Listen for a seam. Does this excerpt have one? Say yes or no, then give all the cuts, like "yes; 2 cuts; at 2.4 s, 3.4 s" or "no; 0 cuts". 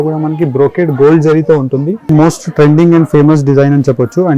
yes; 1 cut; at 2.0 s